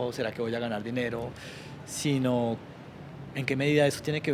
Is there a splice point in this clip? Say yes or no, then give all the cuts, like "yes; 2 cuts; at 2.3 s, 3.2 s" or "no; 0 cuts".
no; 0 cuts